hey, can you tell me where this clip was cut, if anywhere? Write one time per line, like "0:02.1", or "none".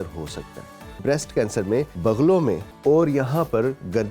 0:01.0
0:01.9
0:02.7